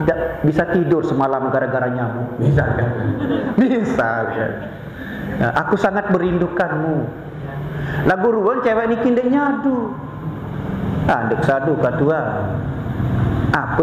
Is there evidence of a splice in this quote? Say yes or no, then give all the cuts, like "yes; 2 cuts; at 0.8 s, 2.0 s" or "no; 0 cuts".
no; 0 cuts